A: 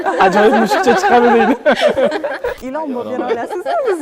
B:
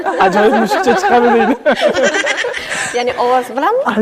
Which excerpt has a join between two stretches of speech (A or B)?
A